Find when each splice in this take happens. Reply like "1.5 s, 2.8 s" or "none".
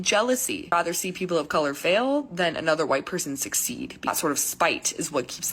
0.7 s, 4.0 s